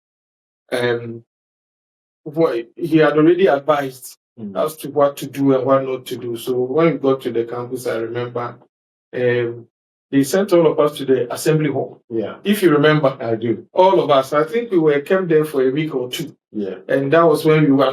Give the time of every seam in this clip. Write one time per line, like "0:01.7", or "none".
none